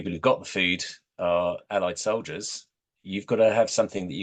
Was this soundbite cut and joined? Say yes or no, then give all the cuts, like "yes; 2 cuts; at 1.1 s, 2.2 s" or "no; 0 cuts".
no; 0 cuts